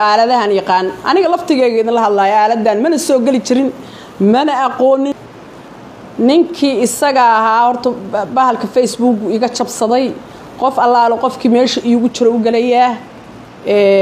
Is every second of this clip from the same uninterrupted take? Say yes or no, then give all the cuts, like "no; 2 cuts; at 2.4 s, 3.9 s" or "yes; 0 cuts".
no; 1 cut; at 5.9 s